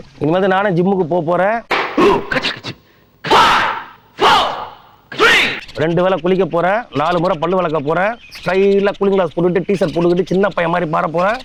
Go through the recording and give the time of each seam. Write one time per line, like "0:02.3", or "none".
none